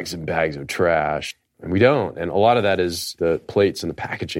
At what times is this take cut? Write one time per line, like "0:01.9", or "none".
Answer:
0:01.4
0:03.4